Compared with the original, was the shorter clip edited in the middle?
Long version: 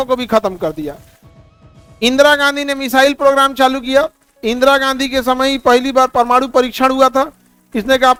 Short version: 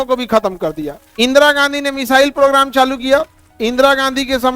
yes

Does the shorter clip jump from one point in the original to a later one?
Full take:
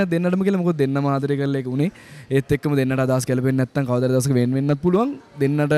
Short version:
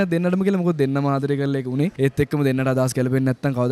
yes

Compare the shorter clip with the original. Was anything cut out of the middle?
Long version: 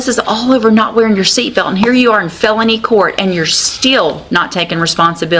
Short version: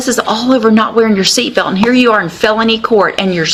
no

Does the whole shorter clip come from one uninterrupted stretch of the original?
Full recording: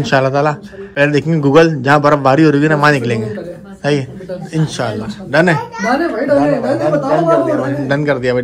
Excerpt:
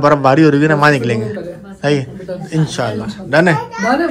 yes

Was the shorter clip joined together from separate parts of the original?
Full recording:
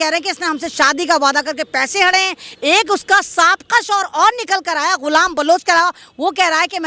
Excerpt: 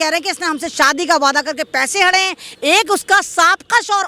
no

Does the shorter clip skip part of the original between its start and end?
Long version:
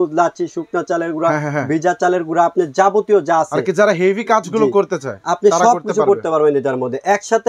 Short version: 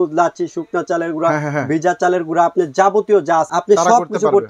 yes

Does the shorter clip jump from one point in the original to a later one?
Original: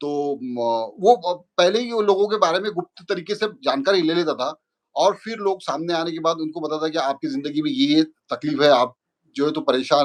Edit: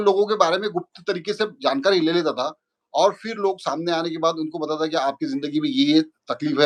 no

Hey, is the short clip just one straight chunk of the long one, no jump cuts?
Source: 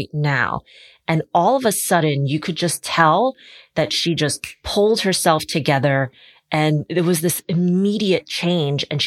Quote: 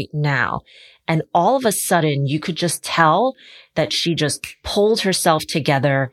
yes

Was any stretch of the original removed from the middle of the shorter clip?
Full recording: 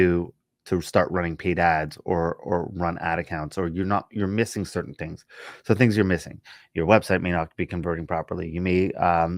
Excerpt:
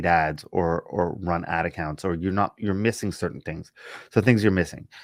no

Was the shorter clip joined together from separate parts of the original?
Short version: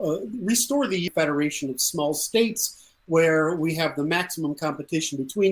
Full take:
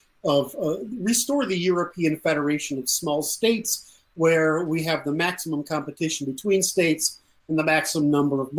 yes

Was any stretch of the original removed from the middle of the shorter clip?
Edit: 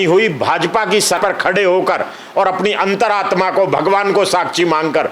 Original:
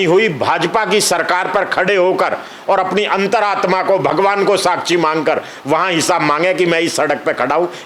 yes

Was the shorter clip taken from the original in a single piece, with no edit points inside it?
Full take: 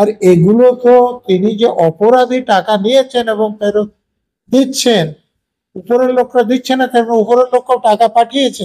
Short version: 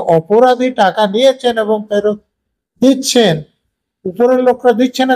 yes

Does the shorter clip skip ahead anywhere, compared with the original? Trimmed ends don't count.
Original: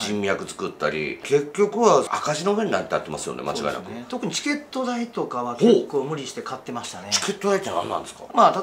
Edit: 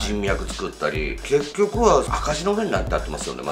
no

